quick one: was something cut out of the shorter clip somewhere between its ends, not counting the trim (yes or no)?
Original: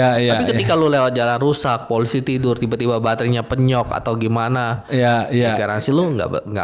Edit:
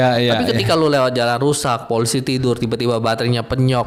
no